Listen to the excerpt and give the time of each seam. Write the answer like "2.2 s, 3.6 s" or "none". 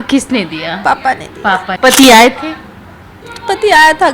1.7 s